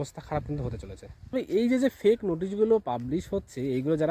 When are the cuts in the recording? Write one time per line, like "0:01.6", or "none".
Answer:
0:01.1